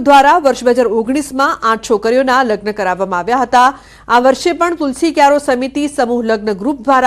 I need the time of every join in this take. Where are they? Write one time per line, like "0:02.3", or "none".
0:02.0

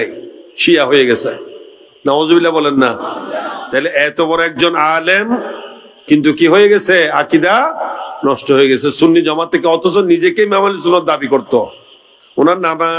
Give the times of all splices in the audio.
none

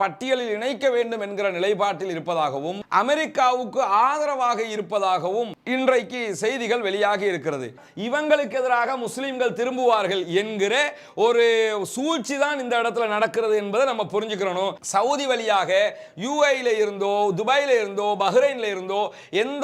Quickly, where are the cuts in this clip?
0:07.9
0:14.8

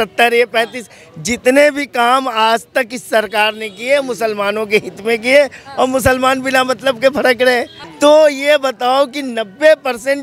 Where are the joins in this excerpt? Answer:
0:07.8

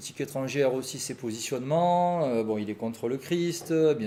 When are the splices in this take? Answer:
none

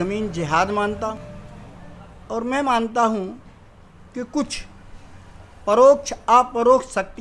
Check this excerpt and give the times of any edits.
0:01.1

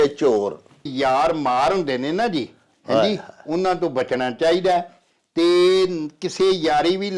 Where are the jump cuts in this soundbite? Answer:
0:00.9

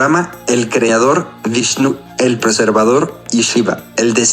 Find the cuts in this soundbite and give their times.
0:01.3
0:03.2

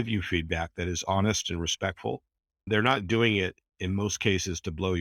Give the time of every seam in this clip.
0:02.7

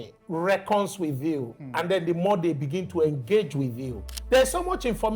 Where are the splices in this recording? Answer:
0:04.0

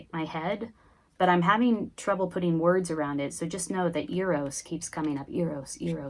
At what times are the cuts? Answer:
none

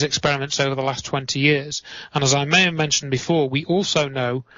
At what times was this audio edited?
none

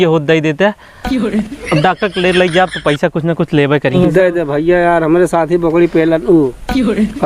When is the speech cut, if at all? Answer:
0:03.9

